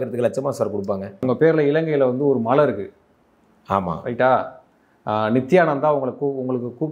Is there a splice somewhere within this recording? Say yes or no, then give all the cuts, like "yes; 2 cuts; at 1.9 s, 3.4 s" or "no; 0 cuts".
yes; 1 cut; at 1.2 s